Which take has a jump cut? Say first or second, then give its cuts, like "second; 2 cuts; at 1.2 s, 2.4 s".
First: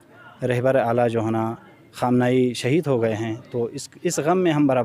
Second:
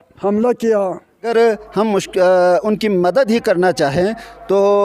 second; 1 cut; at 1.3 s